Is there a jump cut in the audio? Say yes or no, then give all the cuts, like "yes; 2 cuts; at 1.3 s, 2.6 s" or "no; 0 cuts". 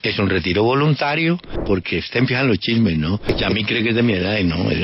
yes; 2 cuts; at 1.5 s, 3.3 s